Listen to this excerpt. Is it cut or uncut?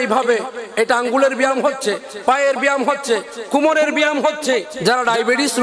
cut